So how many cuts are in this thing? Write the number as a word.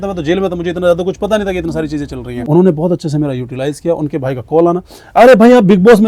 one